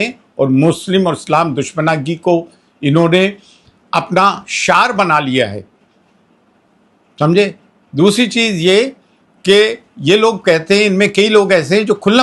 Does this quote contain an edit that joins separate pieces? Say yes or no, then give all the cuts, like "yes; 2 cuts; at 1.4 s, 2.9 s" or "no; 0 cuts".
no; 0 cuts